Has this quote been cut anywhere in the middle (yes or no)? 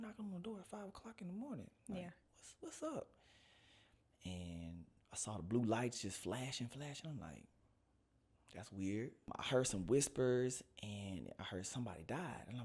yes